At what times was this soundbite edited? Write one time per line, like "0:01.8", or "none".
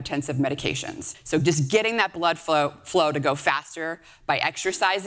0:01.1